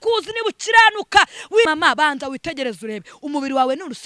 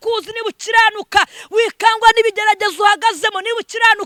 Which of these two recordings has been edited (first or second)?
first